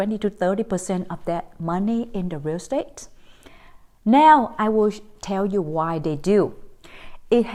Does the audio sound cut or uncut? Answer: uncut